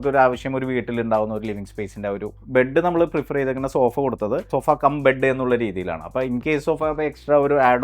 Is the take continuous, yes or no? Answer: no